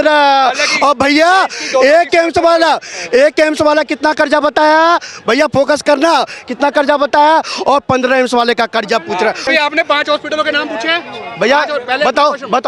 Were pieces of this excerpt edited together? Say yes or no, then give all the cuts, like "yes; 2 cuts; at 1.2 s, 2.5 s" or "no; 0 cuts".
yes; 1 cut; at 9.5 s